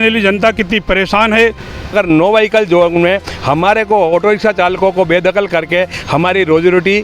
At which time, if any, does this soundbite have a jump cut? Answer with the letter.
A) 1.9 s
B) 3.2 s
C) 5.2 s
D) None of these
A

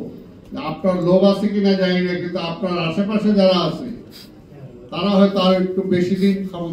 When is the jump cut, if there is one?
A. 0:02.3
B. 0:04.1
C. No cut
C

